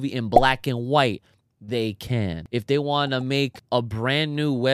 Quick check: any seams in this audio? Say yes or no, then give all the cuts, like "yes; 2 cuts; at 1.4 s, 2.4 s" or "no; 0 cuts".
yes; 2 cuts; at 2.4 s, 3.6 s